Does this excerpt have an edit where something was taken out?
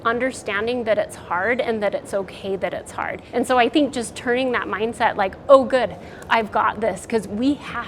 yes; 1 cut; at 3.2 s

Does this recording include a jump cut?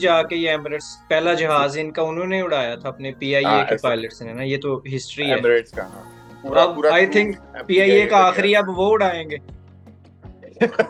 no; 0 cuts

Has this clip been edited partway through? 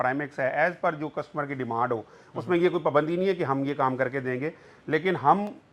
no; 0 cuts

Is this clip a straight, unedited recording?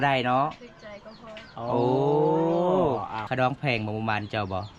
no; 1 cut; at 3.3 s

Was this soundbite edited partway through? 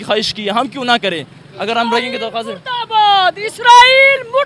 no; 0 cuts

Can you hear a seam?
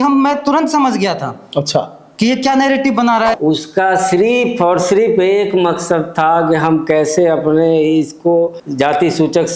yes; 2 cuts; at 3.3 s, 8.6 s

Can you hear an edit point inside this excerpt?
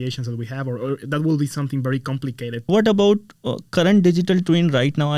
yes; 1 cut; at 2.6 s

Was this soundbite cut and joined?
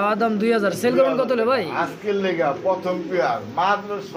no; 0 cuts

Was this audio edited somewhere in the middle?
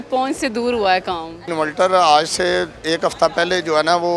yes; 1 cut; at 1.5 s

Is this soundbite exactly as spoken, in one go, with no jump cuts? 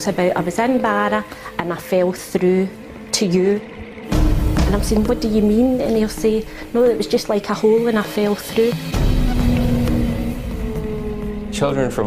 no; 1 cut; at 7.1 s

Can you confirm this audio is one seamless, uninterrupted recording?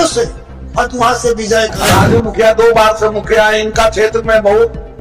no; 1 cut; at 1.8 s

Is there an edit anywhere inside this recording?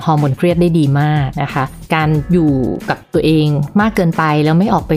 yes; 2 cuts; at 1.7 s, 3.6 s

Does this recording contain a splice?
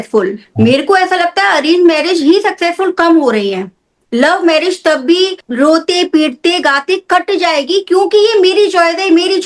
no; 0 cuts

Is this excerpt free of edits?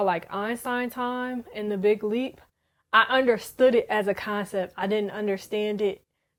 yes; 0 cuts

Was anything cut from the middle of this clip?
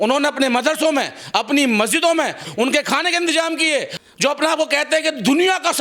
yes; 1 cut; at 3.9 s

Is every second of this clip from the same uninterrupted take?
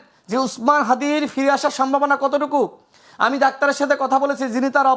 yes; 0 cuts

